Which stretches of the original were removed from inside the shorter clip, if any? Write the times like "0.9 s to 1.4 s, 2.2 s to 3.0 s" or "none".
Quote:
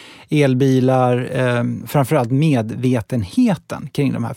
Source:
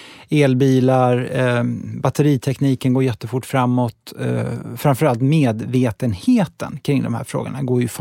1.8 s to 4.7 s

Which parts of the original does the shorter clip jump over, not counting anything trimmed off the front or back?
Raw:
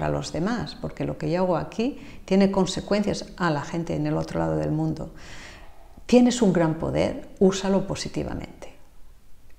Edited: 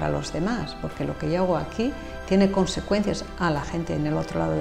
none

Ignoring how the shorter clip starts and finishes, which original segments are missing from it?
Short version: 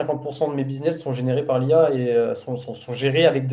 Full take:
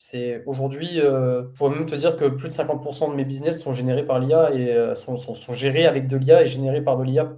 none

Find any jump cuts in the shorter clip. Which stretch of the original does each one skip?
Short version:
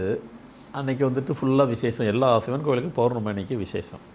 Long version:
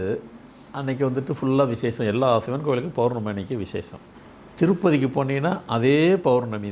none

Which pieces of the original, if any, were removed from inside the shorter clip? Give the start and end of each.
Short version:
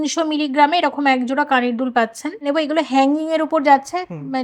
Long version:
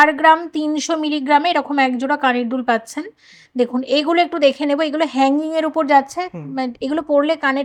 3.1 s to 4.6 s

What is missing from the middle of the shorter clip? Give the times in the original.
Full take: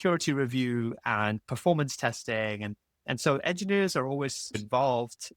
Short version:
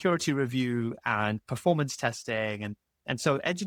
none

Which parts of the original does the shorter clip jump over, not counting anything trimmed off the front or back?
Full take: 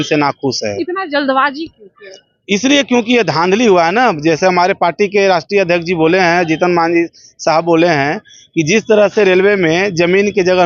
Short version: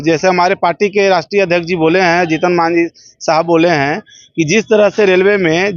none

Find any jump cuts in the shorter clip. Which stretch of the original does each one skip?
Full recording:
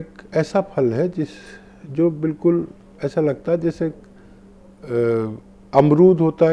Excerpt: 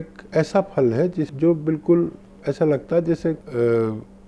1.3 s to 1.9 s, 4.0 s to 4.8 s

